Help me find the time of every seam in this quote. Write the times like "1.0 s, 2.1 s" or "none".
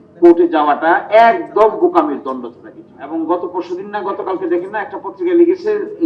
3.0 s